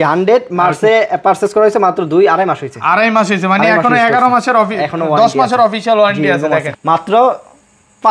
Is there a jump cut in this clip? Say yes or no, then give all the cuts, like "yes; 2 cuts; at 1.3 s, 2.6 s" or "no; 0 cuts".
yes; 1 cut; at 6.7 s